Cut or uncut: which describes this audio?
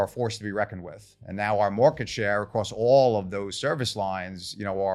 uncut